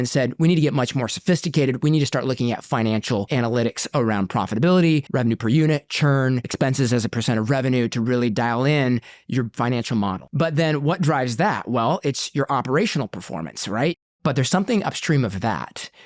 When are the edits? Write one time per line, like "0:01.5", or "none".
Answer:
0:03.3
0:05.1
0:06.5
0:10.2
0:14.0